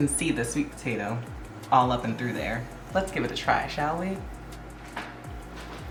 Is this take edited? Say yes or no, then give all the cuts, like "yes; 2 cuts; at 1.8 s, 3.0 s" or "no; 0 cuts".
no; 0 cuts